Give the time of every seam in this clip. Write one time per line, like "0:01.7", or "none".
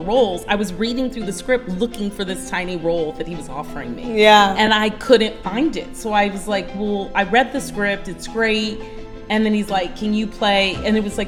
none